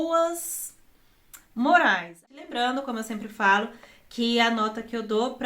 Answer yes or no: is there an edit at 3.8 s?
no